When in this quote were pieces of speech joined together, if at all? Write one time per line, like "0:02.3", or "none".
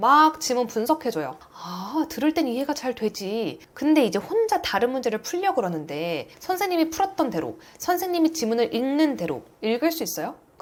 none